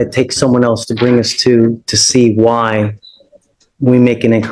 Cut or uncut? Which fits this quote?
uncut